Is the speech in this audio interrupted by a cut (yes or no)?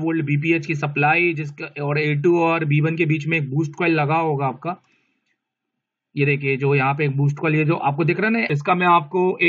yes